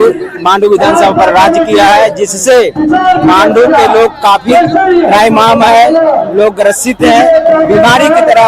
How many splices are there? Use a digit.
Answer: 0